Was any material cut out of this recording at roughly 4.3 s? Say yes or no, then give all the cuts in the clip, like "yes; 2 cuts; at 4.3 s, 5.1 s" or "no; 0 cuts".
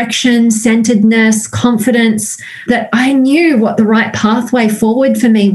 no; 1 cut; at 2.6 s